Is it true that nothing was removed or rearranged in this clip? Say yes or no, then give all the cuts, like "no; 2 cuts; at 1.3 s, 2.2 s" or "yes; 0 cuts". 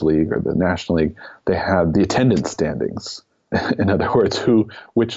no; 2 cuts; at 1.9 s, 3.5 s